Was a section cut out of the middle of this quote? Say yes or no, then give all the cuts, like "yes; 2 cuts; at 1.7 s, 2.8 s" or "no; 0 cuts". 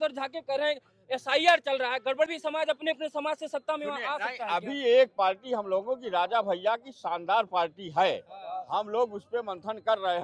yes; 1 cut; at 2.3 s